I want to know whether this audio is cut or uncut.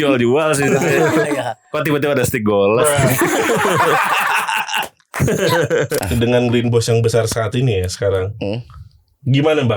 cut